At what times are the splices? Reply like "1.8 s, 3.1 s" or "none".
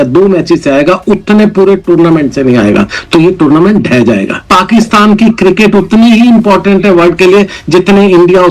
4.5 s